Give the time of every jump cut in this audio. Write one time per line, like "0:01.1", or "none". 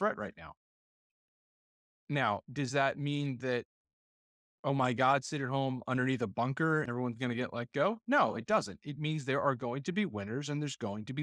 0:06.9

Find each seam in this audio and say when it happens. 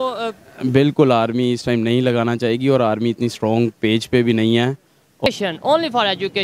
0:05.3

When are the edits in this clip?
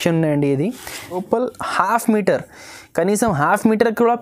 0:01.2

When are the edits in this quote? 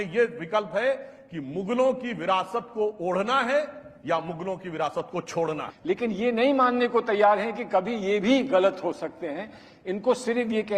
0:05.7

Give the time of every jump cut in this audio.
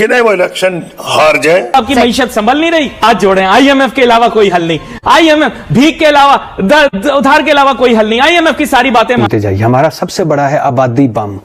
0:01.7
0:09.2

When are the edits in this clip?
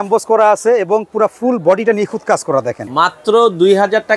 0:02.8

